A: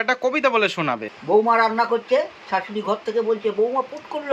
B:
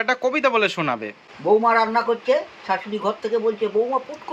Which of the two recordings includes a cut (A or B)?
A